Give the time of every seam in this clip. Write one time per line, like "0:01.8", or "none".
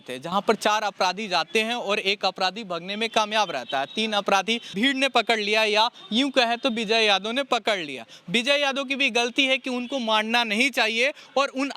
0:04.7